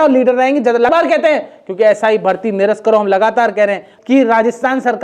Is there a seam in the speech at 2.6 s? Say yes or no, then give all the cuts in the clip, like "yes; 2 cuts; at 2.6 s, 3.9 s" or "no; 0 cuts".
no; 2 cuts; at 0.9 s, 3.9 s